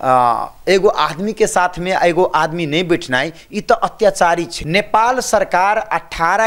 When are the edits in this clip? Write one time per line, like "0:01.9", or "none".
0:04.5